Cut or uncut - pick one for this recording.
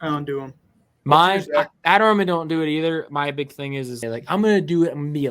cut